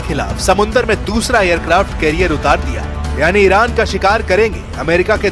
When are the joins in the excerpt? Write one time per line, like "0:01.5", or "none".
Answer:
0:03.5

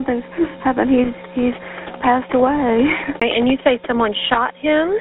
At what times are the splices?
0:03.2

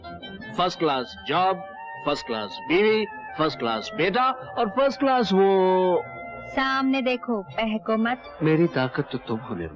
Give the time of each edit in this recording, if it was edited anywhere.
0:08.3

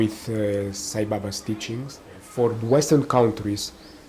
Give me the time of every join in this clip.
0:02.2

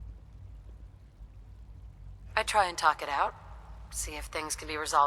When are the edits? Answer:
0:02.3

